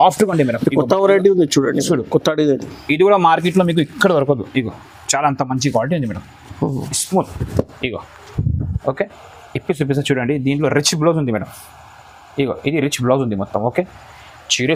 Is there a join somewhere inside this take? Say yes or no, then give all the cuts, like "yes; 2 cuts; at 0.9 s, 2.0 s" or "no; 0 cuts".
no; 0 cuts